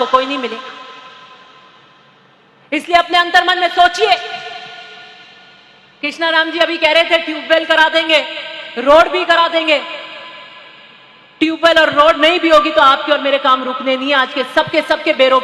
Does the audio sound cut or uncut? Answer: uncut